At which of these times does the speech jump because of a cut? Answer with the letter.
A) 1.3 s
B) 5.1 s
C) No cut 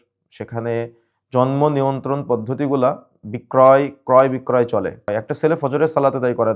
B